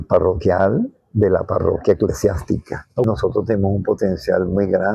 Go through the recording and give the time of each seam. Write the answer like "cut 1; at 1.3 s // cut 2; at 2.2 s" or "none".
cut 1; at 3.1 s

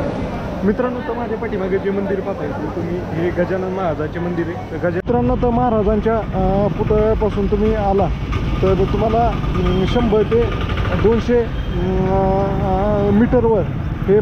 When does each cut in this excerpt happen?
cut 1; at 5.0 s

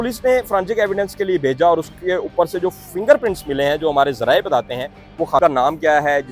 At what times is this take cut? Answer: cut 1; at 5.4 s

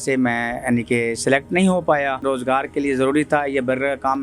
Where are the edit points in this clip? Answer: cut 1; at 2.2 s

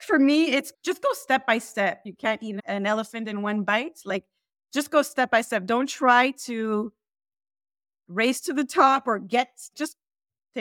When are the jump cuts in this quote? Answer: cut 1; at 2.1 s

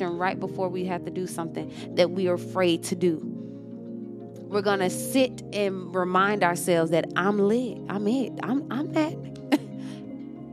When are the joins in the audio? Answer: cut 1; at 3.2 s // cut 2; at 4.5 s

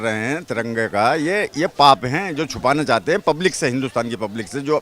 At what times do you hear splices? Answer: none

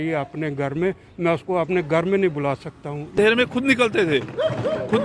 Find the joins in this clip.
cut 1; at 3.1 s

